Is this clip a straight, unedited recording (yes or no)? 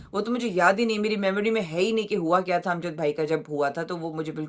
yes